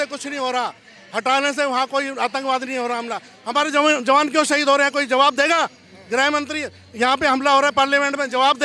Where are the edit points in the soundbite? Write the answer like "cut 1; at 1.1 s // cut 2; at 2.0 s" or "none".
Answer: none